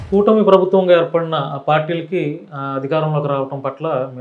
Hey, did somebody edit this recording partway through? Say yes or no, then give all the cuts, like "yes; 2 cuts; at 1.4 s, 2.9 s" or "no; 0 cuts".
no; 0 cuts